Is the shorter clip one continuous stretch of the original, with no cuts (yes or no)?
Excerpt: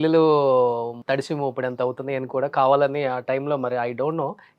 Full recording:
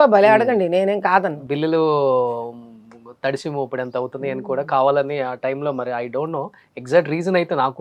no